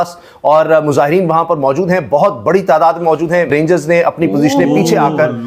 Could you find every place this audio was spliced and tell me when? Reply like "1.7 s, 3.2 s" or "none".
3.5 s